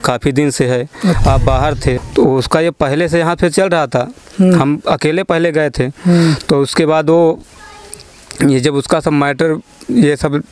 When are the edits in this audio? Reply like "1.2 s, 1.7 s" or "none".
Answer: 2.0 s